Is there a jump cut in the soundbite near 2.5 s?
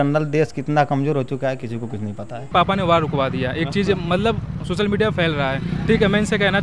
yes; 1 cut; at 2.5 s

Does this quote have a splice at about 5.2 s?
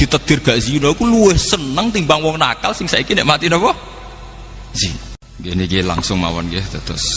yes; 1 cut; at 5.2 s

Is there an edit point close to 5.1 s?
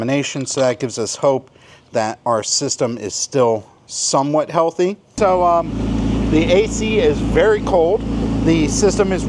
yes; 1 cut; at 5.1 s

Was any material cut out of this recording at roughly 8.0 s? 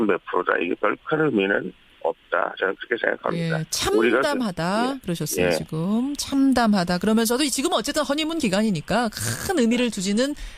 no; 1 cut; at 4.1 s

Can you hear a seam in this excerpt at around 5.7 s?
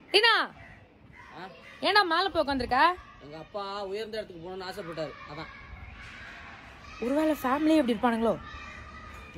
yes; 1 cut; at 5.7 s

